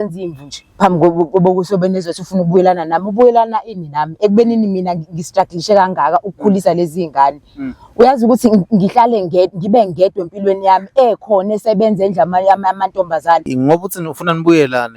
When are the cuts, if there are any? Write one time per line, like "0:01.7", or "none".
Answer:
0:13.5